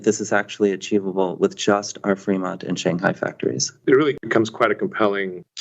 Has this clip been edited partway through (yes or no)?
yes